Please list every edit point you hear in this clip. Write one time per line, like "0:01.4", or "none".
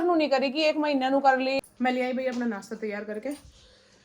0:01.6